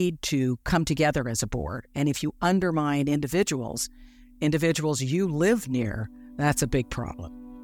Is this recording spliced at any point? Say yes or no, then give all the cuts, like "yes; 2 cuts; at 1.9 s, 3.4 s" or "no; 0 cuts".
no; 0 cuts